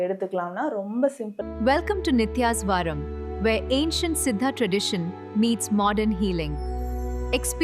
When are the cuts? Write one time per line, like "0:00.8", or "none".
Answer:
0:01.3